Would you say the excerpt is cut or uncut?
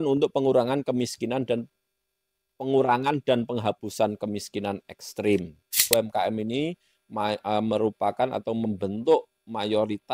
cut